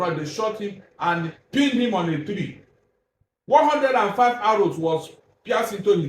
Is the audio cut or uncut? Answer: uncut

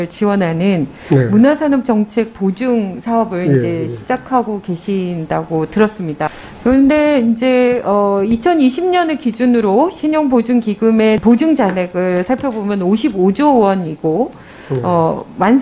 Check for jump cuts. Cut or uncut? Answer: uncut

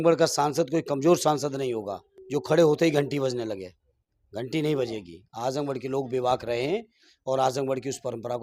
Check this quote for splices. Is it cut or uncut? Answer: uncut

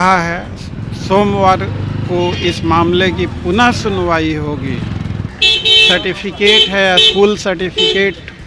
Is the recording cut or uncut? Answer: cut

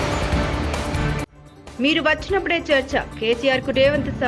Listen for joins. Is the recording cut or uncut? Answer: uncut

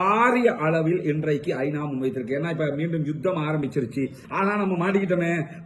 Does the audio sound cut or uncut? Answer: cut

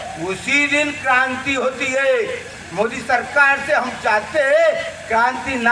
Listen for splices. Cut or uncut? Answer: cut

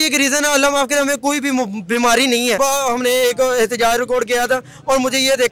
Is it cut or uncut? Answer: cut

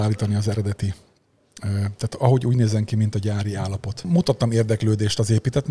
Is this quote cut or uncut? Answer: cut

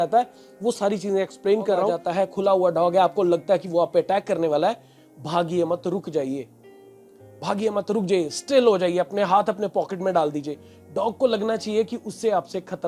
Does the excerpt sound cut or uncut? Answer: cut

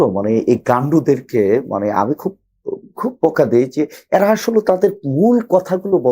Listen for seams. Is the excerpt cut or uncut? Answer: uncut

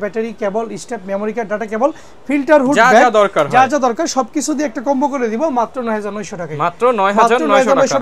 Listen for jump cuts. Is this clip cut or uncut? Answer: uncut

